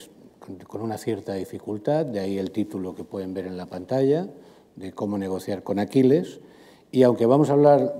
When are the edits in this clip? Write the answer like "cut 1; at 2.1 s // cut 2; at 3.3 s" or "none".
cut 1; at 2.0 s